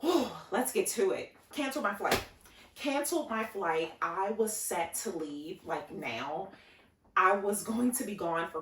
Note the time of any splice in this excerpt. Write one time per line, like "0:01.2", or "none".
0:01.4